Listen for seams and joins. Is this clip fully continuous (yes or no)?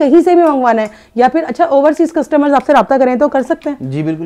yes